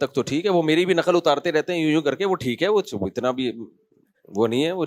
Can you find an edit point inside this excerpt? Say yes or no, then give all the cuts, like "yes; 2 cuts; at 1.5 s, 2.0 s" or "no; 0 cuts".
no; 0 cuts